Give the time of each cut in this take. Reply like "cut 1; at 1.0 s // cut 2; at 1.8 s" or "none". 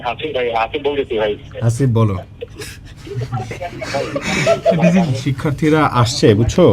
cut 1; at 5.3 s